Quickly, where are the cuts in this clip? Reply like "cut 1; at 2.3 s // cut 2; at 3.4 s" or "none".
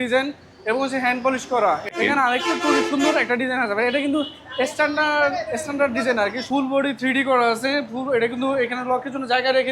cut 1; at 1.9 s // cut 2; at 6.4 s